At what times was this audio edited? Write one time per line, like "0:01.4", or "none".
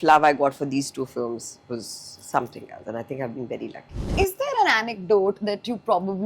0:04.0